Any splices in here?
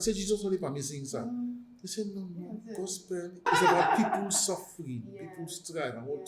yes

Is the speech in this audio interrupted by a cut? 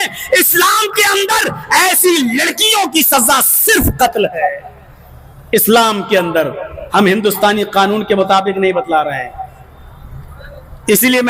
no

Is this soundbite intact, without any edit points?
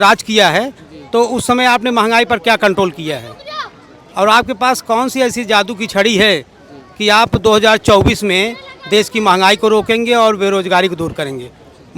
yes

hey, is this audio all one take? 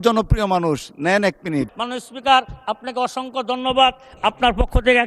no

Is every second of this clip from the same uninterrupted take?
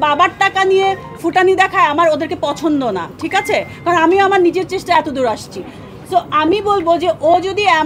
yes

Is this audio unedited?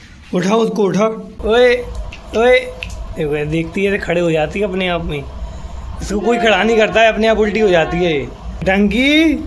no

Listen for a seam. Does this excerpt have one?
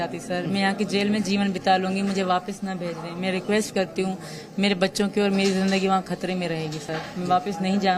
no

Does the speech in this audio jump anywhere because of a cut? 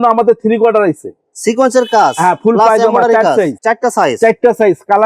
no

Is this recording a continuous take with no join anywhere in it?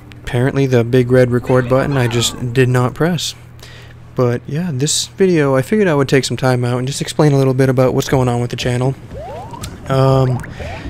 no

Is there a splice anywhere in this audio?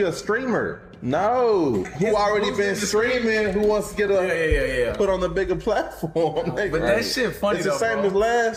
no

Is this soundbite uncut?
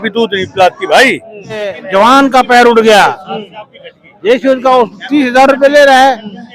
no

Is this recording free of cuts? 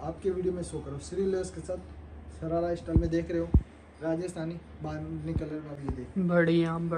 yes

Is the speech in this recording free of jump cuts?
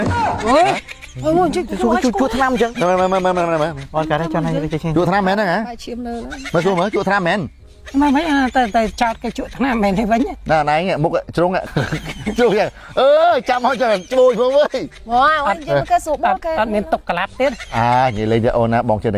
yes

